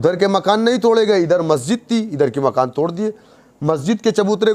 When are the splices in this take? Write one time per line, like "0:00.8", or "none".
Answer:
none